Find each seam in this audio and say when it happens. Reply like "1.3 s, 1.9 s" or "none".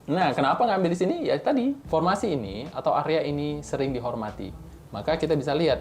1.8 s

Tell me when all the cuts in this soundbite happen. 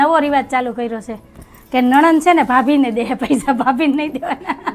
none

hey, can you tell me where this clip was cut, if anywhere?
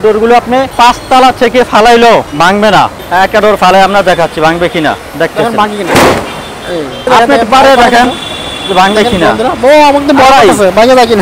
2.9 s, 7.1 s

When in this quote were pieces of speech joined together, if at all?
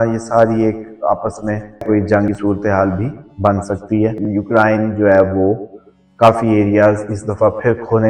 1.8 s, 4.2 s

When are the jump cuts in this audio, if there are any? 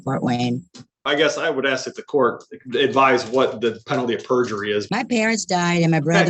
1.0 s, 4.9 s

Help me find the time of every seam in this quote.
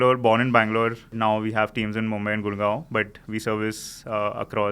1.1 s

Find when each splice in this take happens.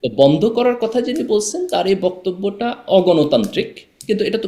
none

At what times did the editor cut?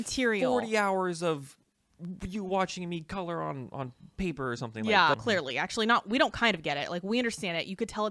5.1 s

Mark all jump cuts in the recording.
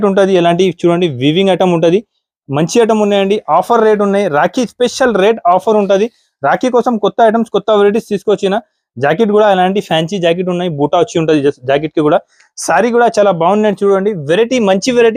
none

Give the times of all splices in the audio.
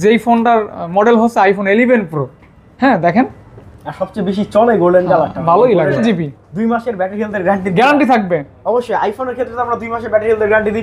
6.0 s

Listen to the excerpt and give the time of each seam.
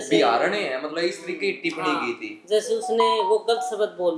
none

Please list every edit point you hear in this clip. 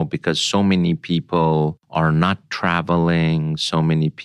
1.8 s

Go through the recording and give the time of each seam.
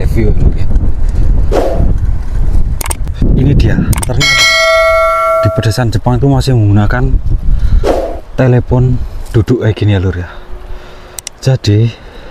3.0 s

